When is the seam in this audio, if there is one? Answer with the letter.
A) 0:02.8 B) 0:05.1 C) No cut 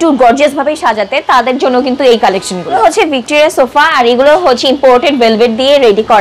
A